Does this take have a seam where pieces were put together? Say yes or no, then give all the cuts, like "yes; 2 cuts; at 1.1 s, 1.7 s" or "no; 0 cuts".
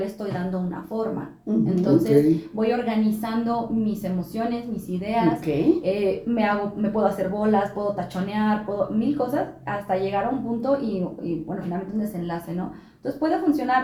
no; 0 cuts